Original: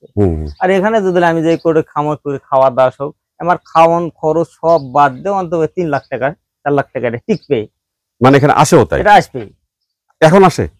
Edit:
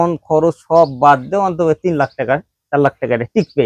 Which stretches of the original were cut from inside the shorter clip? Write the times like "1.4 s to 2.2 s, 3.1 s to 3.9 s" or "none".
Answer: none

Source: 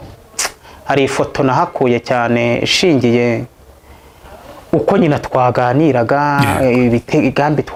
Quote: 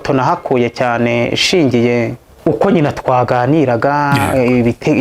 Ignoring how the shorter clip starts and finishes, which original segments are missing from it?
3.5 s to 4.5 s

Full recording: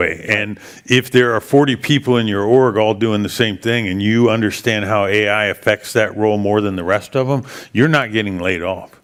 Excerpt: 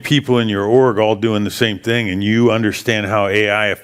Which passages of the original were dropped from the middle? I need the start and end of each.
none

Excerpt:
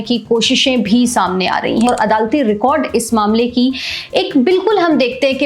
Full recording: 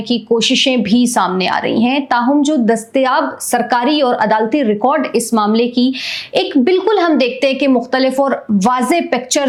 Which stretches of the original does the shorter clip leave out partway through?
1.9 s to 4.1 s

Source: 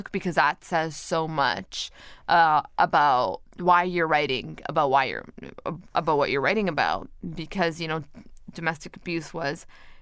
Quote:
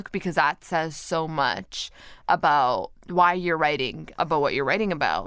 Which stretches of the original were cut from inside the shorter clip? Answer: 2.2 s to 2.7 s, 4.5 s to 5.8 s

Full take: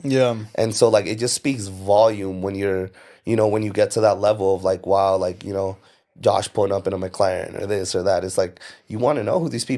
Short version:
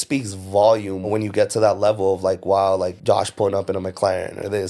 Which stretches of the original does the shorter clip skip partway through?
2.4 s to 3.5 s, 5.4 s to 6.1 s

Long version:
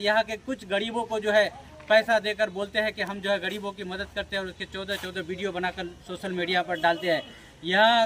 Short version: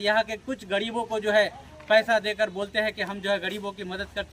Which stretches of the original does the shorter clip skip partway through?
none

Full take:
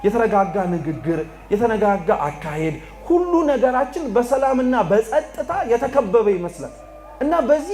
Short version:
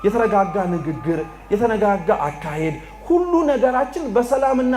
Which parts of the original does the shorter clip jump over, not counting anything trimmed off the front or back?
none

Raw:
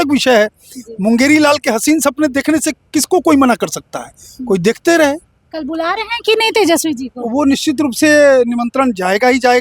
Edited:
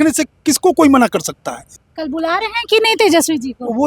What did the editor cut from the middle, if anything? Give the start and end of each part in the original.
4.3 s to 5.3 s

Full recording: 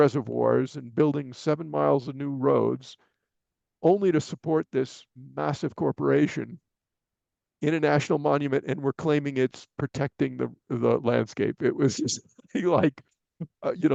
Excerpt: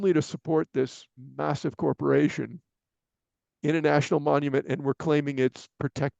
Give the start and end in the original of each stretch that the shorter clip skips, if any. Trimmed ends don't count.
none

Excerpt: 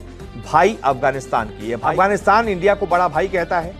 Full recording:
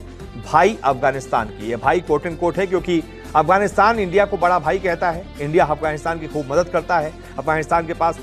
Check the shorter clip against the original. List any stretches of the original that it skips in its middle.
1.7 s to 3.2 s

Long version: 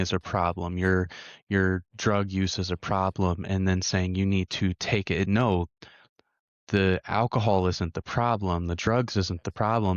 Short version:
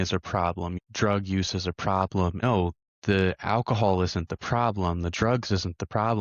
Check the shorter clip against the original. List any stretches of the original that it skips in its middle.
0.8 s to 1.8 s, 3.4 s to 6.0 s

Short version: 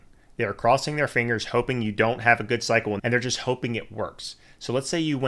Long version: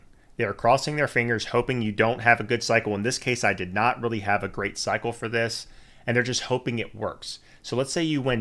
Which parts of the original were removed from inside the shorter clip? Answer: 3.0 s to 6.0 s

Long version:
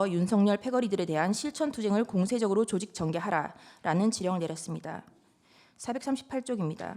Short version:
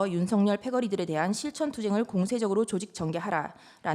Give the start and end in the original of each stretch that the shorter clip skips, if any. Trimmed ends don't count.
none

